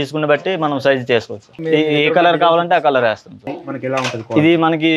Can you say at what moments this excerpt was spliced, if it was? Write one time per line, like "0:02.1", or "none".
0:01.6